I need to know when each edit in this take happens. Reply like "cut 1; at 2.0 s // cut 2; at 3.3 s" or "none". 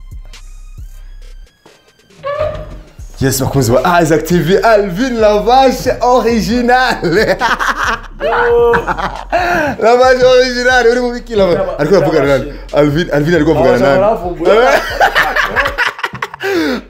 none